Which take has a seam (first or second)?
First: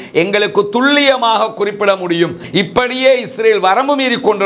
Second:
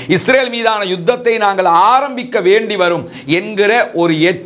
first